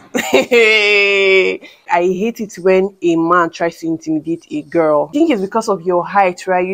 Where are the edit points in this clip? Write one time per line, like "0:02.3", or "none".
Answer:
0:01.9
0:05.1